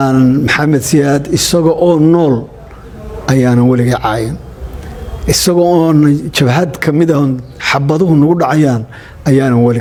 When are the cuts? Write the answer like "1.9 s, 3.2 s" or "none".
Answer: none